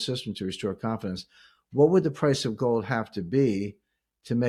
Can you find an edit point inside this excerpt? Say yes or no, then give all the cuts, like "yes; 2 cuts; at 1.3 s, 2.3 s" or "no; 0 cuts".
no; 0 cuts